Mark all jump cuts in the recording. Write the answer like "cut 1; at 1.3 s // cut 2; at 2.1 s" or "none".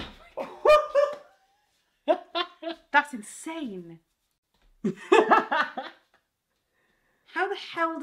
none